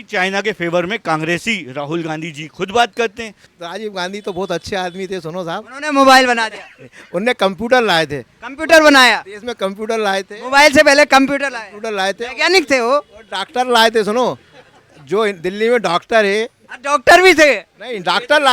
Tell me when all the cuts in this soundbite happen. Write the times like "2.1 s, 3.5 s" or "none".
3.5 s